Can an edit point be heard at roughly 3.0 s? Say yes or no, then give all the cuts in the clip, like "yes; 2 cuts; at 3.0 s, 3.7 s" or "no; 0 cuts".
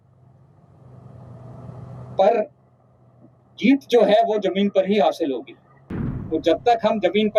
no; 1 cut; at 6.1 s